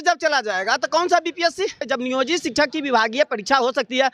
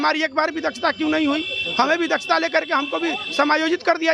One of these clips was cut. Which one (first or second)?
first